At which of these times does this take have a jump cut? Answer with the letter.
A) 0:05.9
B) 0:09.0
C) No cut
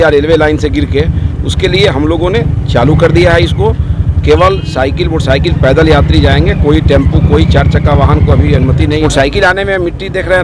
B